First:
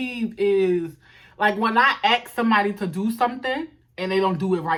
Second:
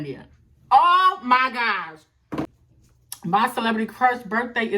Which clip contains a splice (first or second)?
second